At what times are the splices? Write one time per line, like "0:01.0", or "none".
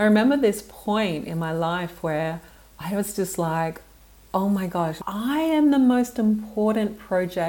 0:05.0